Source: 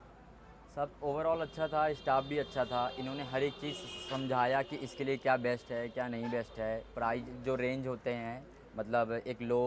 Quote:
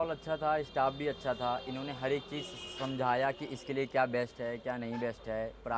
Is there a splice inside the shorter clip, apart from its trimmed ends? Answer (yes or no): no